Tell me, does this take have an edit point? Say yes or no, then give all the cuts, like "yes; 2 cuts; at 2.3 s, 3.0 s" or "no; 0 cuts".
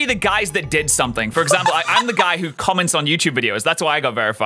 no; 0 cuts